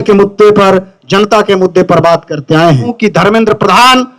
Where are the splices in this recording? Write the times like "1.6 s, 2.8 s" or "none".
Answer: 2.9 s